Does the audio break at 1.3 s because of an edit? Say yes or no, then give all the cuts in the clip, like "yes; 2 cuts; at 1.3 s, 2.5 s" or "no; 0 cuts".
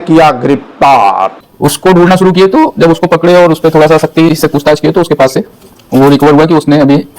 yes; 1 cut; at 1.3 s